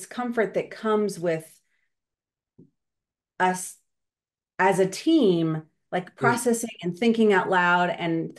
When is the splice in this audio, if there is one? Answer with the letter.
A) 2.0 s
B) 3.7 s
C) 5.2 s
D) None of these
D